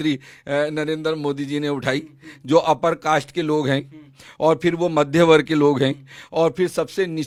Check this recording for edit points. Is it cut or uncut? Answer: uncut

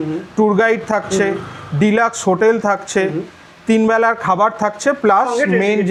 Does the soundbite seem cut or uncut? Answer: uncut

